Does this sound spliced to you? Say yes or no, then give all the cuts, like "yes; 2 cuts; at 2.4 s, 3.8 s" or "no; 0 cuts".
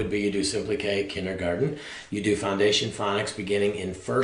no; 0 cuts